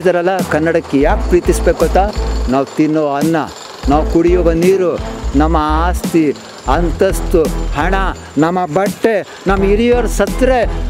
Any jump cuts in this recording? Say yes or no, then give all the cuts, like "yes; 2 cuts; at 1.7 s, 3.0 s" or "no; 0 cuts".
no; 0 cuts